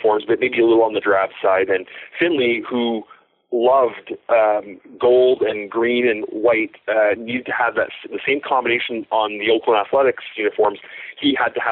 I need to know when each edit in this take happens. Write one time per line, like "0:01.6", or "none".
none